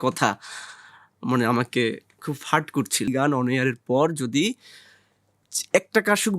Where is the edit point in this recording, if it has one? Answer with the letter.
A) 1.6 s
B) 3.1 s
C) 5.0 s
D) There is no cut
B